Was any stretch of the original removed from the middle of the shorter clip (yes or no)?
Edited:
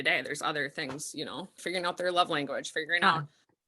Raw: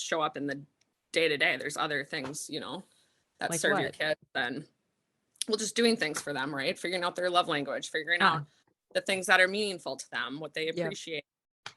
yes